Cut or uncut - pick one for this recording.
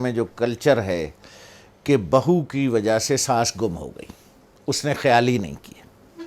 uncut